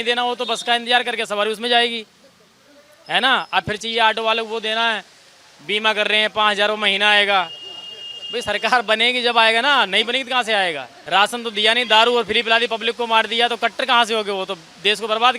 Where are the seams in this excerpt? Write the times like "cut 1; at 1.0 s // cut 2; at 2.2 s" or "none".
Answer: cut 1; at 10.9 s